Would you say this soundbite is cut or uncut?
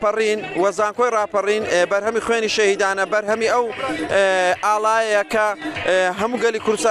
uncut